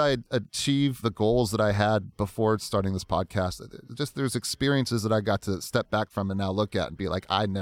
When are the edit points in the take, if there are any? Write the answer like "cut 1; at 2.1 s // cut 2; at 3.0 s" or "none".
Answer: cut 1; at 1.1 s